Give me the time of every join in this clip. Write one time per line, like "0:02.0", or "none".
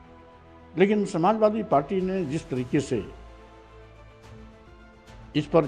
0:03.1
0:04.6